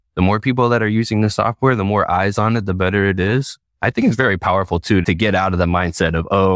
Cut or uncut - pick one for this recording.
cut